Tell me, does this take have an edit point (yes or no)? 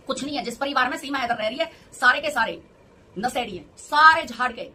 no